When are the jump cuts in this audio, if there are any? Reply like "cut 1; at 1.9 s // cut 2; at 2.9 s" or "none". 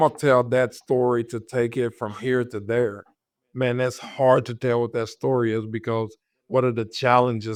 none